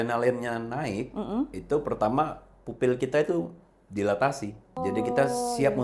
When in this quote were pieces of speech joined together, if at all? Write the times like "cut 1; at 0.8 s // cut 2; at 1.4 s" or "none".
cut 1; at 4.7 s